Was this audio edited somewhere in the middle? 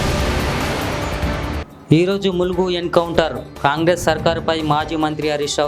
yes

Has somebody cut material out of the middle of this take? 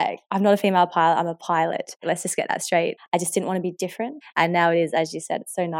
yes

